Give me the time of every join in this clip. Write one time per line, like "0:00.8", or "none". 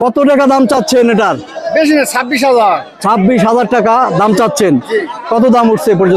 none